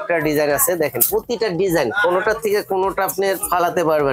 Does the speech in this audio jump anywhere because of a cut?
no; 0 cuts

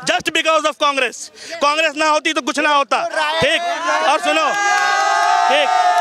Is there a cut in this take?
no; 0 cuts

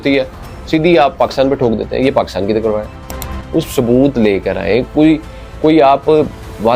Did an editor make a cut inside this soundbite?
no; 0 cuts

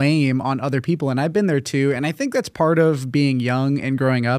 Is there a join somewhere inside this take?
no; 0 cuts

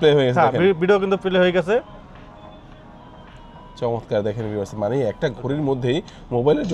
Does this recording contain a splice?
no; 0 cuts

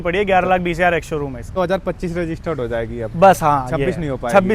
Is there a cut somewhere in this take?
yes; 1 cut; at 1.5 s

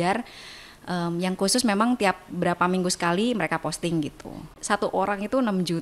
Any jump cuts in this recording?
yes; 1 cut; at 4.6 s

